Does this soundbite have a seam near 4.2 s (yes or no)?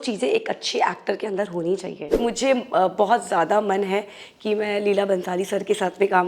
no